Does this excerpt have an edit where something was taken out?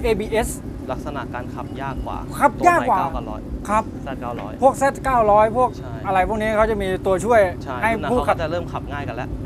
no; 0 cuts

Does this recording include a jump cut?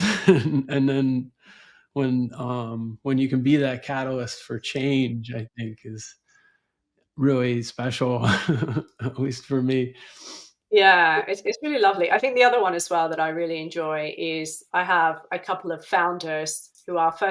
no; 0 cuts

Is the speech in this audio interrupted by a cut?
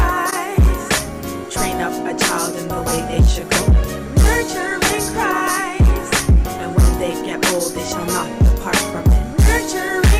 no; 0 cuts

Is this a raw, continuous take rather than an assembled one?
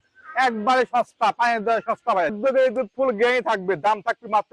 no; 1 cut; at 2.4 s

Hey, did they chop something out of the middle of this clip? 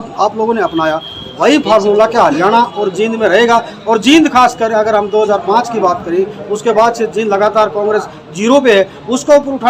no; 0 cuts

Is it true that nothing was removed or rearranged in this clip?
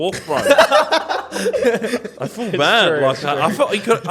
yes; 0 cuts

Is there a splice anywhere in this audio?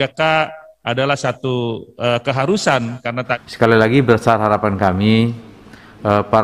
yes; 1 cut; at 3.3 s

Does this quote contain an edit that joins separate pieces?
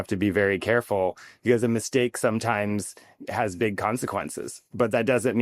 no; 0 cuts

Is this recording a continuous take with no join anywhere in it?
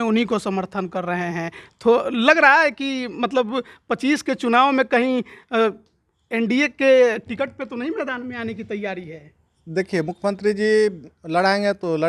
yes; 0 cuts

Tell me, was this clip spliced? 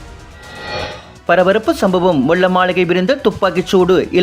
no; 0 cuts

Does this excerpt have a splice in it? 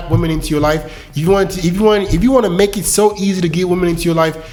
no; 0 cuts

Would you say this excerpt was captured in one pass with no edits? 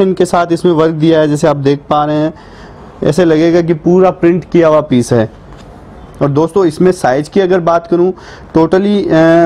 yes; 0 cuts

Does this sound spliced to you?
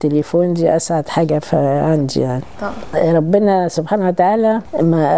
yes; 1 cut; at 2.8 s

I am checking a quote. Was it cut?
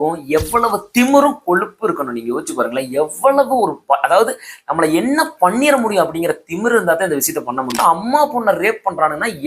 yes; 1 cut; at 7.8 s

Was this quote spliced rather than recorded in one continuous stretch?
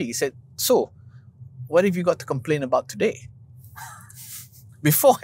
no; 0 cuts

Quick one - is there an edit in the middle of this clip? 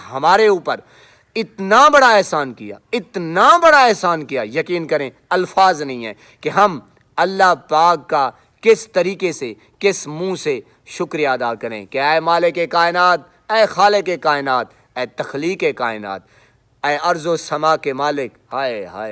no; 0 cuts

